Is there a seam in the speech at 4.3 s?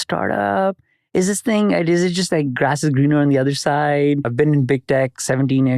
yes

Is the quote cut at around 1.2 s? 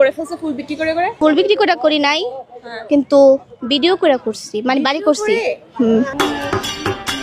yes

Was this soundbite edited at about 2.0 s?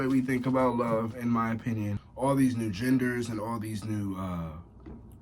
yes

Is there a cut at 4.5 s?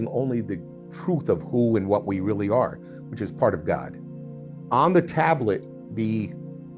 yes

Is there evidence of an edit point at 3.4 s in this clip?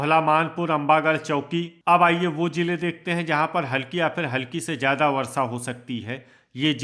no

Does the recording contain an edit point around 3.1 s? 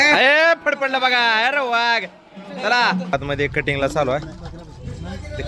yes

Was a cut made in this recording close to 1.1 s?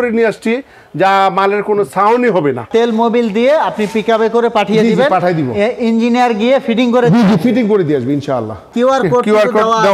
no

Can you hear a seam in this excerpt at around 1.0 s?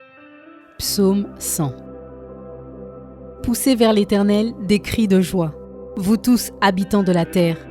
yes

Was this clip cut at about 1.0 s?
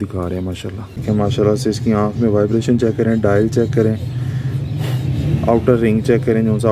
yes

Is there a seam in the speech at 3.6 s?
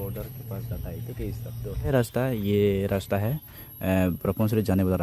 no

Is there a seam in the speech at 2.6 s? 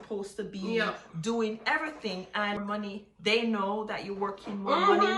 yes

